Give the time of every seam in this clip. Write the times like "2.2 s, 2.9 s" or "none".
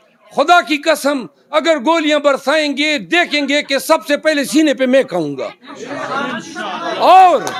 none